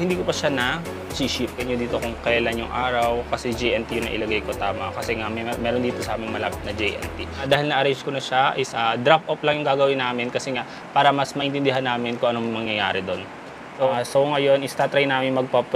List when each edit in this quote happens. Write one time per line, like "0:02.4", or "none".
0:01.6
0:07.4
0:13.9